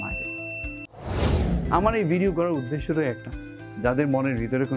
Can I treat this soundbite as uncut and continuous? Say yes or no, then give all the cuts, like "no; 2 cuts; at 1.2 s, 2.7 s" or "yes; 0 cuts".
no; 1 cut; at 1.1 s